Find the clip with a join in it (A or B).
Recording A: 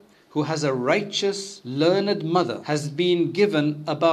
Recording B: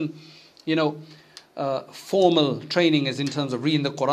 A